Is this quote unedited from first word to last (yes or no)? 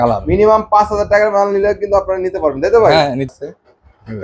no